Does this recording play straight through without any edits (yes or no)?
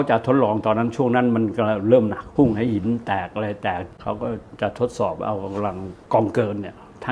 no